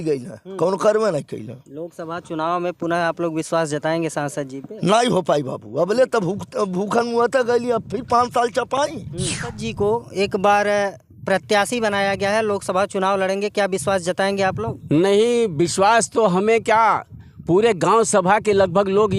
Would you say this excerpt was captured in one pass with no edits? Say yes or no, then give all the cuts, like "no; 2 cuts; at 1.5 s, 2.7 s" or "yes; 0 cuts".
no; 1 cut; at 9.6 s